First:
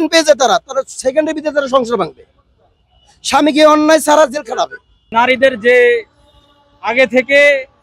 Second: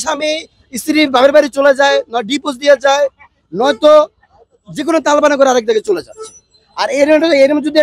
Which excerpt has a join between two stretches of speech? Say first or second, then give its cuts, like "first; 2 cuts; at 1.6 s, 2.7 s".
first; 1 cut; at 5.1 s